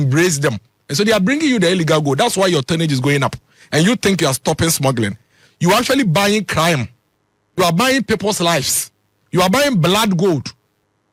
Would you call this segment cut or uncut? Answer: uncut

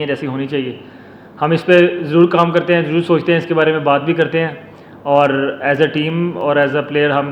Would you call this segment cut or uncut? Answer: uncut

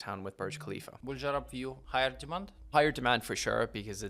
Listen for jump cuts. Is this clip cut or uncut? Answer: cut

